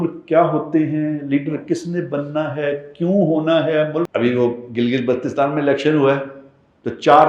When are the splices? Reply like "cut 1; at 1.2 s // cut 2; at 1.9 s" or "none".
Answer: cut 1; at 4.1 s